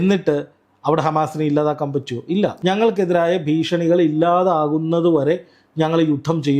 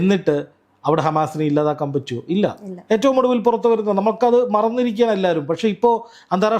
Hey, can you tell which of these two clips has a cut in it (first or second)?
first